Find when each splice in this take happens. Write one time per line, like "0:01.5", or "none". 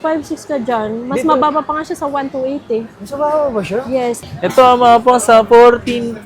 0:04.2